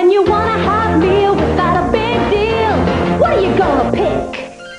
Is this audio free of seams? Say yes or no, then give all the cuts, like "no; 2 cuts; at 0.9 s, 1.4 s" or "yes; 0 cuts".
yes; 0 cuts